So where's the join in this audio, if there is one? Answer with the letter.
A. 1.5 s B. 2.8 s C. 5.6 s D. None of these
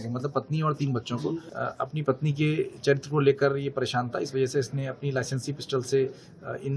A